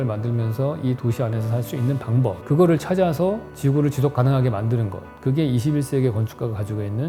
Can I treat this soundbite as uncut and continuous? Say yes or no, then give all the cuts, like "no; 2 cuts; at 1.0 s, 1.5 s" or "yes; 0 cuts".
yes; 0 cuts